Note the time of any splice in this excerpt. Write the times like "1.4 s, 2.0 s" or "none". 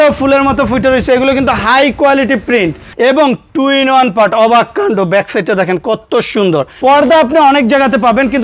2.8 s, 6.7 s